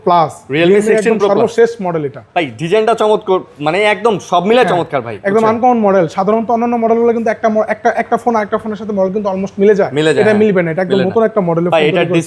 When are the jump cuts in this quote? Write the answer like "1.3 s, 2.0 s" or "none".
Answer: none